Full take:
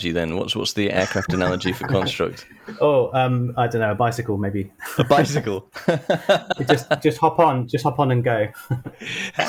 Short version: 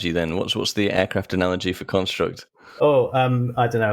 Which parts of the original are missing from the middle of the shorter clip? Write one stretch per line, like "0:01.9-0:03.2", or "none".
none